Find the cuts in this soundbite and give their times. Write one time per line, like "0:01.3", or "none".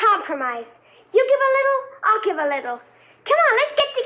0:02.9